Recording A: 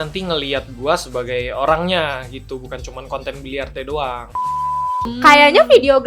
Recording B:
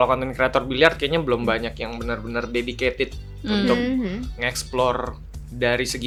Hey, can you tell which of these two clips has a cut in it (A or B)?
A